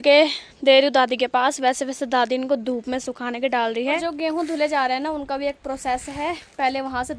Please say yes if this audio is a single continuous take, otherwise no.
no